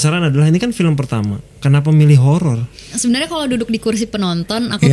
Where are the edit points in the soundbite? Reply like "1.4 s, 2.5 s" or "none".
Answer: 3.0 s

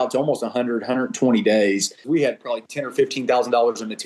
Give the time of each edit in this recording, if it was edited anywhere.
2.0 s

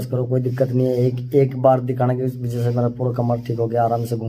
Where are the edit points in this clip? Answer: none

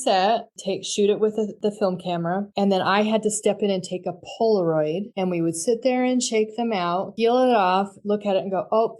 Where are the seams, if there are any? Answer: none

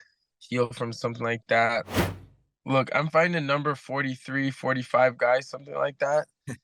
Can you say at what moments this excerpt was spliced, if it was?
1.9 s

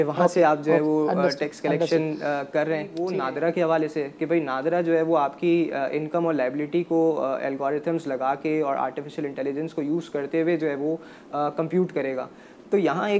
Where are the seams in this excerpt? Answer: 3.0 s

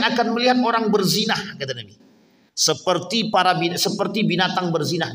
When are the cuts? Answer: none

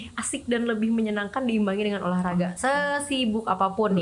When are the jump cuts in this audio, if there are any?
none

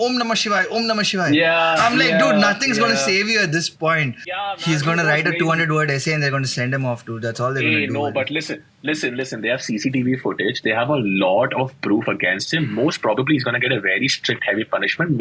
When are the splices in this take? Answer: 4.2 s

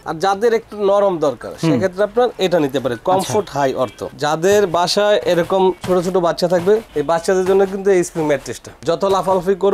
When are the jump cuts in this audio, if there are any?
4.0 s

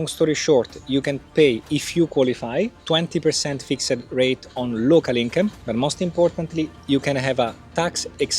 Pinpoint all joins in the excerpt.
1.3 s, 2.8 s, 5.6 s

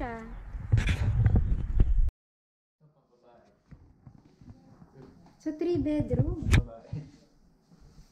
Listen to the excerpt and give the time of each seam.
2.2 s

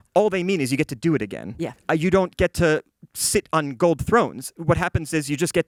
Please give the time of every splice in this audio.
none

